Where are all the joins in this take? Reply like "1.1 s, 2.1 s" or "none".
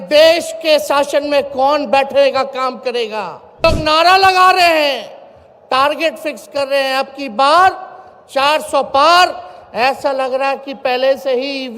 3.6 s